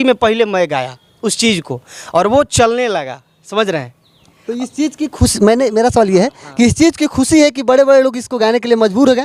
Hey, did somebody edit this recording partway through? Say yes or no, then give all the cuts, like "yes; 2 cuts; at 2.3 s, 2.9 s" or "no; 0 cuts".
no; 0 cuts